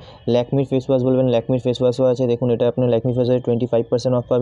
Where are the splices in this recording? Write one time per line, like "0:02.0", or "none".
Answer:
none